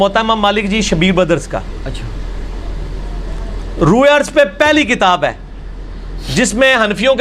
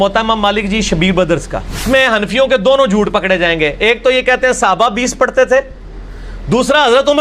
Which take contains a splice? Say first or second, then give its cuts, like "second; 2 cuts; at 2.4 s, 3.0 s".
second; 1 cut; at 1.8 s